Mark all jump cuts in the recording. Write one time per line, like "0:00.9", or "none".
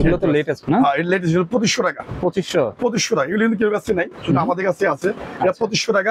none